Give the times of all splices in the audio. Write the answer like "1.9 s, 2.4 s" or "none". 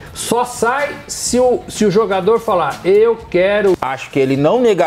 3.7 s

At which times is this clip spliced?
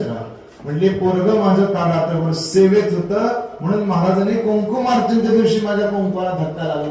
none

